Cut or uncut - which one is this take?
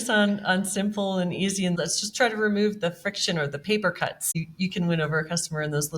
cut